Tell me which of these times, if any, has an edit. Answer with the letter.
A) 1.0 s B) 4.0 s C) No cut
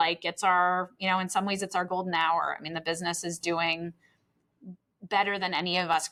C